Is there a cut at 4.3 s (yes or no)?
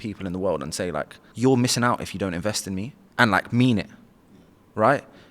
no